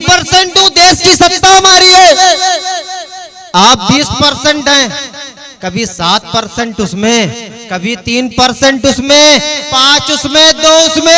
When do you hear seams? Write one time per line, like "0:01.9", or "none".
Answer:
none